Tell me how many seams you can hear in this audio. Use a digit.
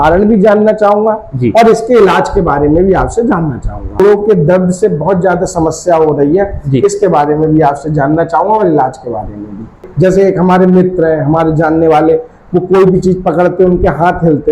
2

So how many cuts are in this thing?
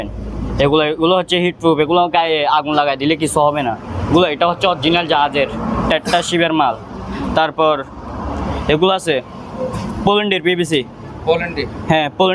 0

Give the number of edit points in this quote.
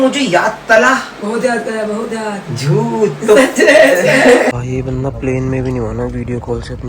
1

